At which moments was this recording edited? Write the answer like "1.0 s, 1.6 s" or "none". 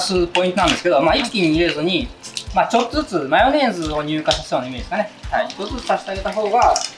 none

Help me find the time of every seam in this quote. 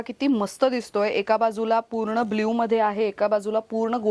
none

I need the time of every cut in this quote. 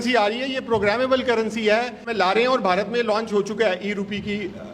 2.1 s

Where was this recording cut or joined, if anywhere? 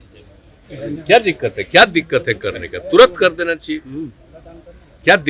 none

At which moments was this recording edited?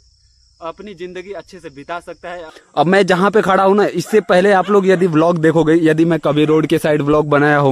2.5 s

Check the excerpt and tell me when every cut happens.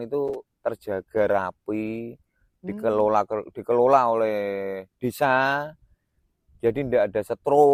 none

